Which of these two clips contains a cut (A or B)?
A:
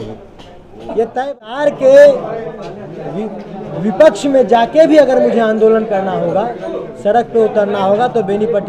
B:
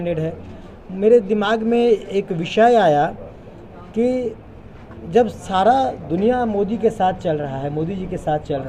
A